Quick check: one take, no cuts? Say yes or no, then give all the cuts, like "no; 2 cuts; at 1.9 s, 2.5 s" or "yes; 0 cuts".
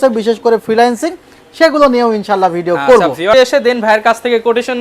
no; 1 cut; at 3.3 s